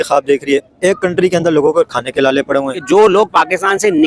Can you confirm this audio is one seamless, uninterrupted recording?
no; 1 cut; at 2.8 s

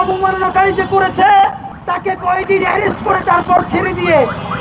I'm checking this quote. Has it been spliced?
yes; 1 cut; at 1.7 s

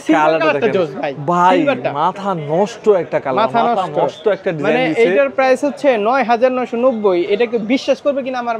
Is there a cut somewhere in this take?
no; 0 cuts

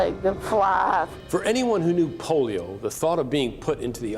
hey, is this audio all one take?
yes; 0 cuts

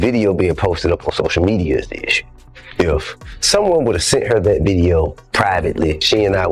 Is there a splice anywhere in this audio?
no; 0 cuts

